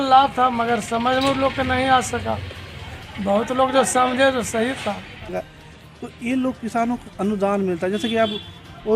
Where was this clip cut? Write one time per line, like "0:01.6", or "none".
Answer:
0:05.3